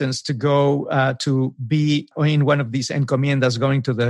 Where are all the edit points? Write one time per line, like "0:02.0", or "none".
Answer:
0:02.1